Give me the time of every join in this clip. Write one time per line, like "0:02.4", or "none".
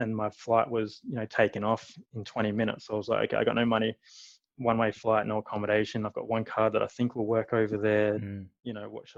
none